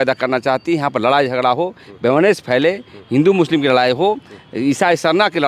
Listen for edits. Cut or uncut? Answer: uncut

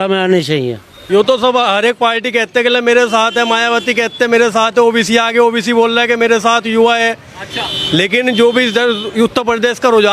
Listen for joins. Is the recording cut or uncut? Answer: cut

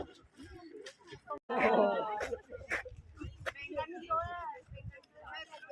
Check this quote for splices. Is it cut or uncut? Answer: uncut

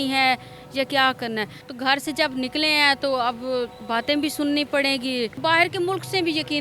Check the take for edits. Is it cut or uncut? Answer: cut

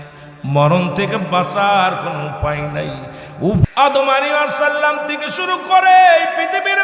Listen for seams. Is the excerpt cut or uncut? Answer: cut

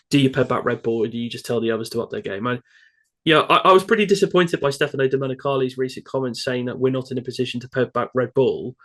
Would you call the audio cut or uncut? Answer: uncut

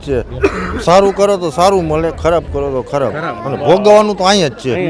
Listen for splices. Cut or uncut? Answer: uncut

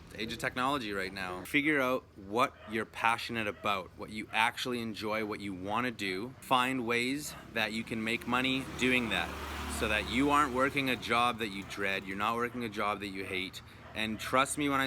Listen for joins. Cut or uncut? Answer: cut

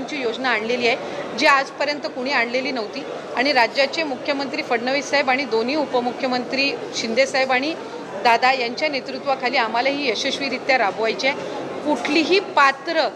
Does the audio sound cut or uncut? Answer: uncut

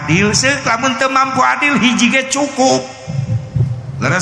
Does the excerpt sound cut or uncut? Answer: uncut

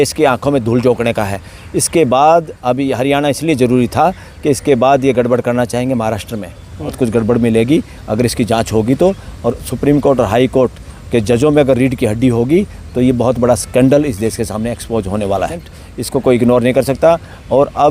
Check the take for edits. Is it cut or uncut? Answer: cut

